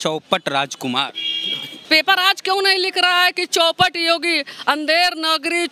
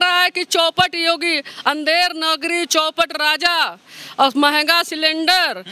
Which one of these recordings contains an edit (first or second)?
first